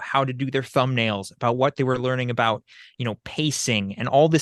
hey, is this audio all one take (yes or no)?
yes